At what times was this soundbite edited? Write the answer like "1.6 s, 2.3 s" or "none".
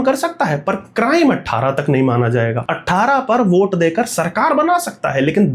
2.7 s

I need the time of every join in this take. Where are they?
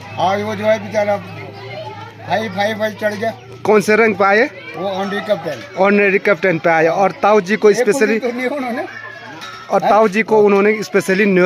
none

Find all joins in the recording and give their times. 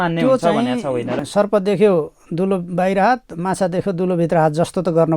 1.2 s

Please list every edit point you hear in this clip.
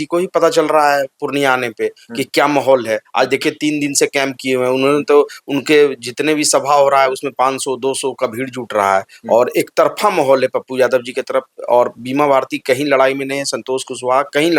none

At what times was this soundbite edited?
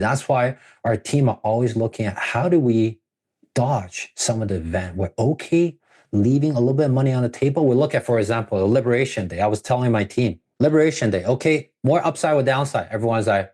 10.4 s

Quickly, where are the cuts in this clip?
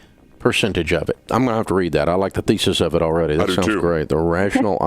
1.2 s

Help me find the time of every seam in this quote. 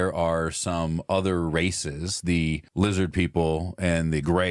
2.7 s

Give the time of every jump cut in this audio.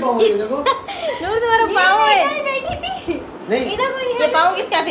none

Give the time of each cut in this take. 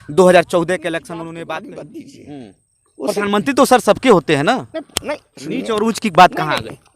1.7 s

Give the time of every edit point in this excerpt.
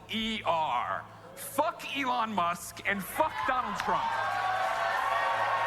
none

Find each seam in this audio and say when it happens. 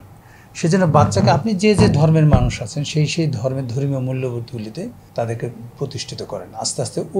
5.0 s

